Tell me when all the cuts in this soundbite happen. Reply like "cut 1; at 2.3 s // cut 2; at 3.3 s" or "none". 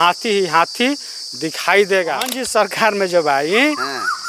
cut 1; at 2.4 s